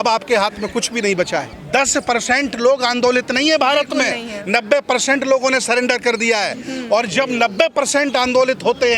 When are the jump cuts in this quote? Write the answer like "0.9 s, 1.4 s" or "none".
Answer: 1.5 s